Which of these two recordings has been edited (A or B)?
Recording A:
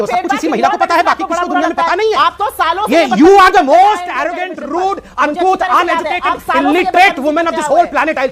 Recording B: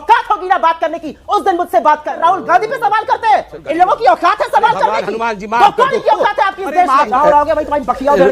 B